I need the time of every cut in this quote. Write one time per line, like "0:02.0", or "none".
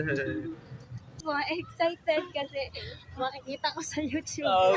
0:01.2